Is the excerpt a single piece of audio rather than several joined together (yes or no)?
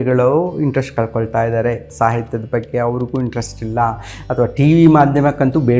yes